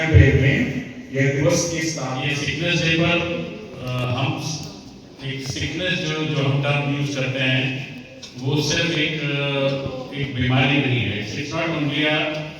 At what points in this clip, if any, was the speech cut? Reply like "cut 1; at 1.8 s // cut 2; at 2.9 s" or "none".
cut 1; at 2.1 s